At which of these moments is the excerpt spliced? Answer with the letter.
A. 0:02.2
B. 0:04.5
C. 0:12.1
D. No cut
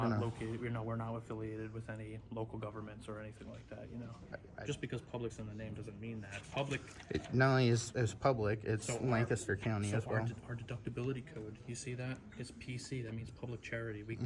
B